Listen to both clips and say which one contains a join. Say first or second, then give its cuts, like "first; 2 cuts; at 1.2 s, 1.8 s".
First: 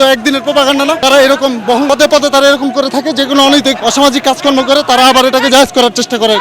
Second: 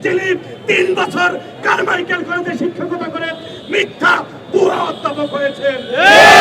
first; 3 cuts; at 1.0 s, 1.9 s, 3.8 s